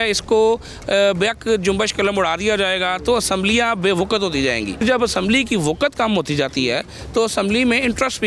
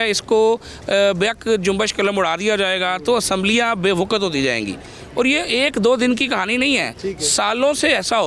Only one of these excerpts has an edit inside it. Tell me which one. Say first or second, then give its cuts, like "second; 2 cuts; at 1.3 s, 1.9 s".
first; 1 cut; at 4.8 s